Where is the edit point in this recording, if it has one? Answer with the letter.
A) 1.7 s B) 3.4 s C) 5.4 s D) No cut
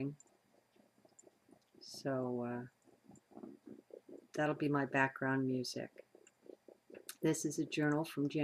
C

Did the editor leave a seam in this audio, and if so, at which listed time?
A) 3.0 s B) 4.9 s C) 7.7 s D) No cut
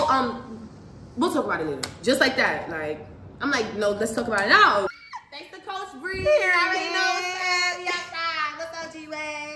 B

